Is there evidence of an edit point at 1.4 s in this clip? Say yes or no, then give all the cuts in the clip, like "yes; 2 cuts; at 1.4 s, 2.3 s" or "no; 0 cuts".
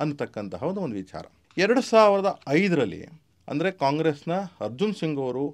no; 0 cuts